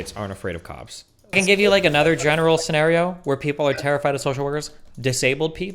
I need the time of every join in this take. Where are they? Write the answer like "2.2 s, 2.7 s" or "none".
1.4 s